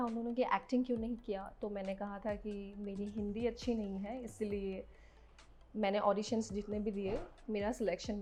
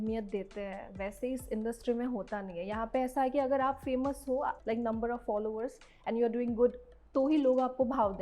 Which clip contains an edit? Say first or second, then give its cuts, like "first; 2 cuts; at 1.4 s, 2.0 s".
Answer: second; 2 cuts; at 4.6 s, 6.9 s